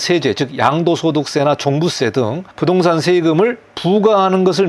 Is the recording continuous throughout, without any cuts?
yes; 0 cuts

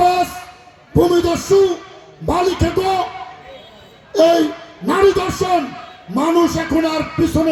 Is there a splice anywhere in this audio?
no; 0 cuts

